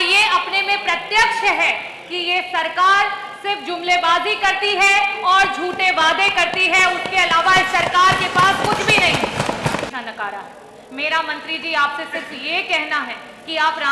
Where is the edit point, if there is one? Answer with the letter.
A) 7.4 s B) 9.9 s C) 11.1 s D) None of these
B